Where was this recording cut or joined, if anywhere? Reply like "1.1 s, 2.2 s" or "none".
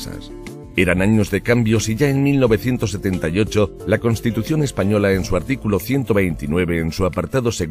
6.4 s

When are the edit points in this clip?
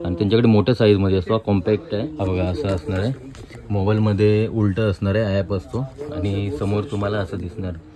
2.0 s

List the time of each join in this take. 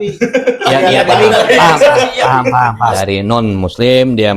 2.9 s

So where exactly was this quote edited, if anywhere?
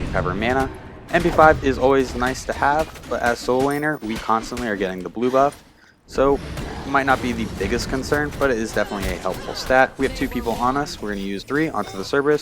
11.4 s

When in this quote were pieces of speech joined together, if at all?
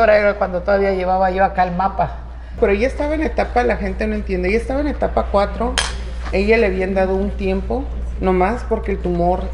2.5 s

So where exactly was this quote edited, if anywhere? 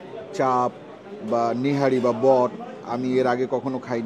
none

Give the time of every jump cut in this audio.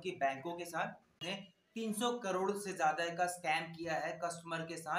1.6 s

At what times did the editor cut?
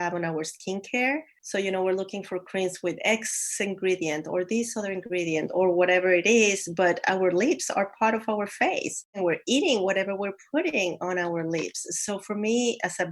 1.4 s, 9.2 s

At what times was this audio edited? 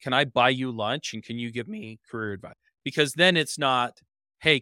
2.6 s

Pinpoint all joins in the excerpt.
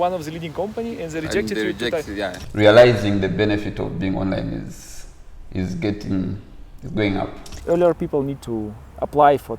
2.4 s, 7.6 s

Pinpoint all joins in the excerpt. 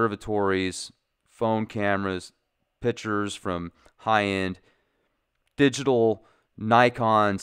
4.4 s

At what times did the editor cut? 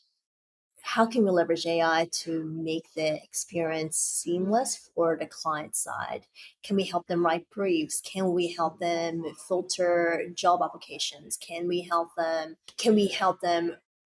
12.7 s

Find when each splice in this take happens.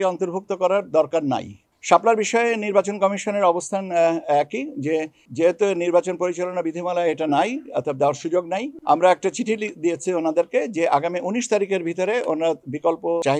1.7 s

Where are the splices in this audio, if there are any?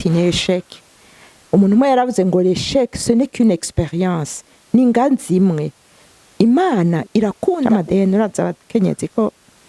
7.6 s

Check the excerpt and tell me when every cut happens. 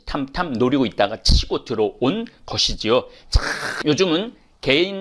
3.7 s

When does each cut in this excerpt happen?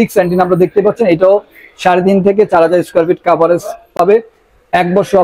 none

